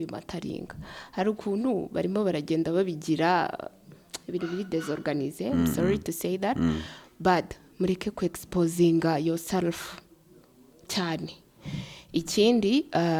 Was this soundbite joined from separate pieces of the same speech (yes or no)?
no